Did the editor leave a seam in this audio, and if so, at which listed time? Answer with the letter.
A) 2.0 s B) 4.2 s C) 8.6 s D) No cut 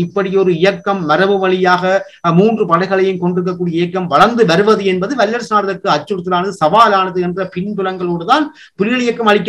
D